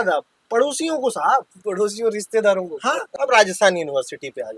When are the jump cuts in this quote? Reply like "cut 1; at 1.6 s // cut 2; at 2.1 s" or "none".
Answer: cut 1; at 3.1 s